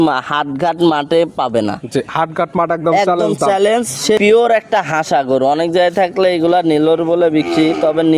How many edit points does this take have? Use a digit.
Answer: 1